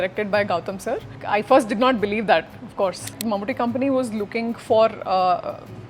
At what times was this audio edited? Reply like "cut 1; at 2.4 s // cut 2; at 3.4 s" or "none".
cut 1; at 1.2 s // cut 2; at 3.2 s